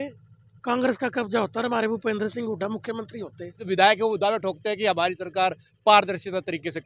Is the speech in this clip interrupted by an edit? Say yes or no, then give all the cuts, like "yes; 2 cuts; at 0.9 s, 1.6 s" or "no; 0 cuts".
yes; 1 cut; at 3.6 s